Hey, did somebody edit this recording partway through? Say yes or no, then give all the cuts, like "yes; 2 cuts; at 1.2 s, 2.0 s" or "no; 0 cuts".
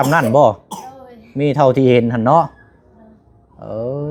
no; 0 cuts